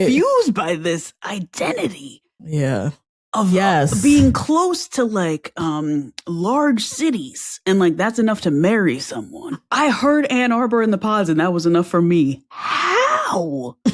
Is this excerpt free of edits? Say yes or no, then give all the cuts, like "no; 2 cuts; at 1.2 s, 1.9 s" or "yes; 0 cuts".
no; 1 cut; at 9.6 s